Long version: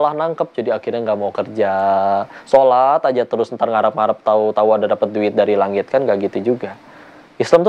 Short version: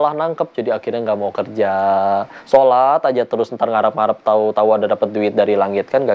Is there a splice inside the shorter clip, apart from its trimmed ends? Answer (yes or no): no